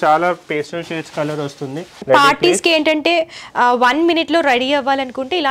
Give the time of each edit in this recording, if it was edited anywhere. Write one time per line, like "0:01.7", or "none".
0:01.9